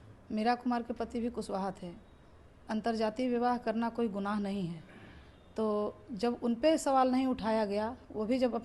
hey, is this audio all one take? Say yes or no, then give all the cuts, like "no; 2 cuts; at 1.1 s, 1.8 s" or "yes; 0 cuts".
yes; 0 cuts